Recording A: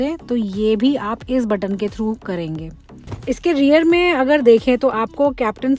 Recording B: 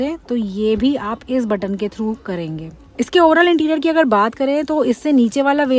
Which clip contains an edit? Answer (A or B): A